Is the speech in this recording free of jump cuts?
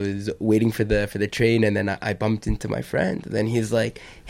yes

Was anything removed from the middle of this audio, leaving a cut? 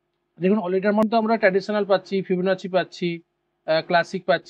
yes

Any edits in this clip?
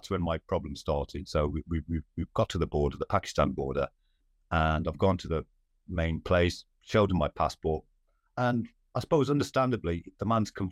no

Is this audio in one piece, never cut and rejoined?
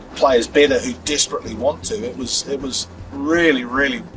yes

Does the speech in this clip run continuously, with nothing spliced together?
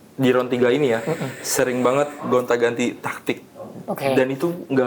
yes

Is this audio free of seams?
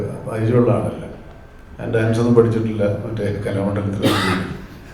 yes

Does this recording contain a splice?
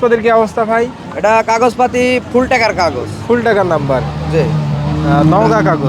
no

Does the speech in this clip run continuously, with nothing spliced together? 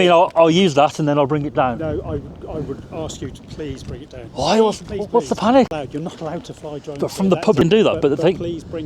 no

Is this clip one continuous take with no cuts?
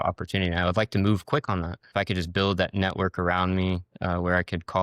no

